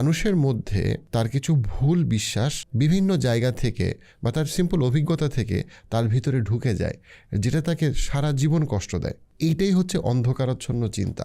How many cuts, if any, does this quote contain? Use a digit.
3